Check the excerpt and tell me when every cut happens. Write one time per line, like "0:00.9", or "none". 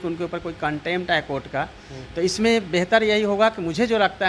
none

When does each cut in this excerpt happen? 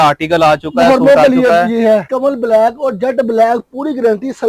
0:02.1

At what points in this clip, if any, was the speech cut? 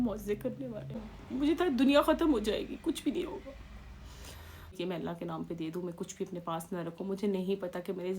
0:01.1
0:04.7

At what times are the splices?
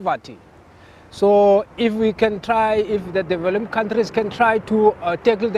0:02.4

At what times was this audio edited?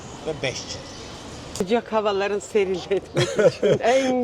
0:01.6

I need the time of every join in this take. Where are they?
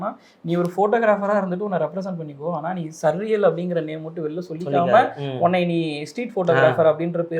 none

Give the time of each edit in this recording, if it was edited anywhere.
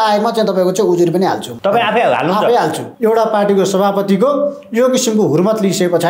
0:01.5
0:02.9

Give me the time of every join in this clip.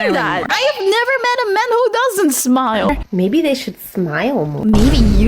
0:02.9

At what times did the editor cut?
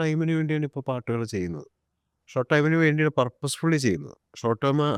none

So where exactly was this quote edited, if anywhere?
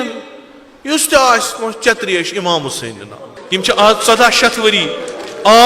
0:03.1

